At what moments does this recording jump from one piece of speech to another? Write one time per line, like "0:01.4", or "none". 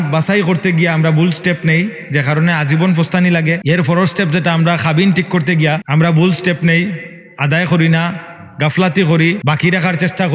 0:03.6
0:05.8
0:09.4